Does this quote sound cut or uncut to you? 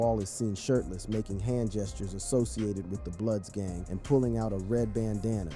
uncut